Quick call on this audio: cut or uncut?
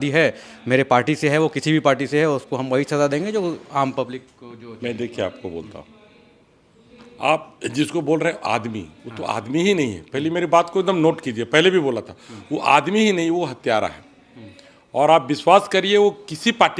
uncut